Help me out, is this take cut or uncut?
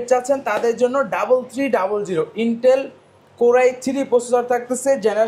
uncut